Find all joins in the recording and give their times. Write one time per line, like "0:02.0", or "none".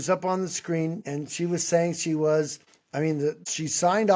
0:01.0
0:03.0